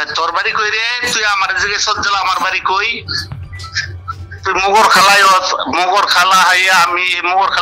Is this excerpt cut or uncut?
uncut